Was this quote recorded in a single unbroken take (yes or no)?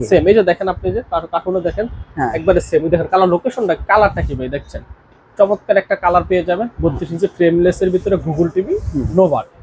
yes